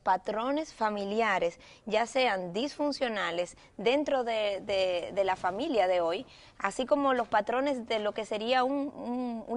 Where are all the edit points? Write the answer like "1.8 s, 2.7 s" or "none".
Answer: none

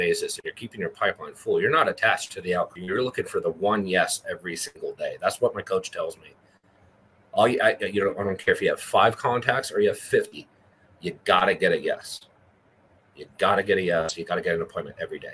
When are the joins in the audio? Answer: 2.8 s

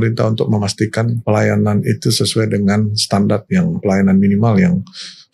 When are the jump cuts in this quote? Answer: 1.2 s, 3.8 s

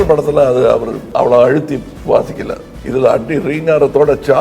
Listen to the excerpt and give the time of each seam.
1.0 s, 1.9 s, 2.7 s

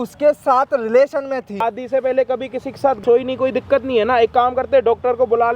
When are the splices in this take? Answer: 1.6 s, 3.0 s

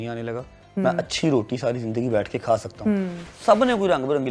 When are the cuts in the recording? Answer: 3.2 s

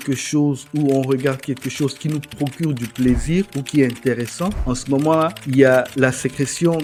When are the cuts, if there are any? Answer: none

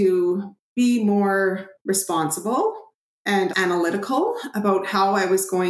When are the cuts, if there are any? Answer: 1.7 s, 3.5 s

